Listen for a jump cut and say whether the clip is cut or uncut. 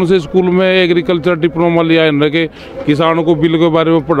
uncut